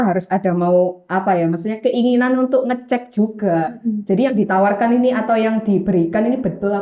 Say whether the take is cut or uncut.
uncut